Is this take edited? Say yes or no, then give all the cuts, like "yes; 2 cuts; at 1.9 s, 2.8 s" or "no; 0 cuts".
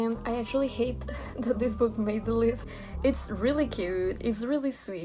yes; 1 cut; at 2.7 s